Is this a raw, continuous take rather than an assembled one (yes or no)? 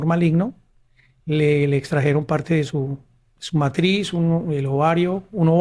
yes